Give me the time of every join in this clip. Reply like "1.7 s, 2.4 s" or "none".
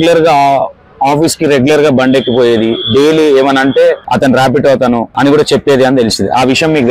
4.0 s, 5.1 s